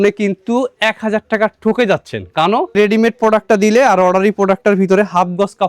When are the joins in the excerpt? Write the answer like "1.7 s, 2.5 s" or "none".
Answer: 2.7 s